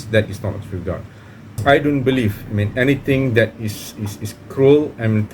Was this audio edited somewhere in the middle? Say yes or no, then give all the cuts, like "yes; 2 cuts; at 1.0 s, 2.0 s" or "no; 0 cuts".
yes; 1 cut; at 1.6 s